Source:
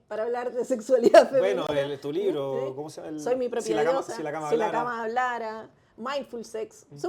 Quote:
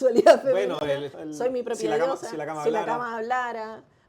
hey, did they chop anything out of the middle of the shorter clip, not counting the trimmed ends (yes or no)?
yes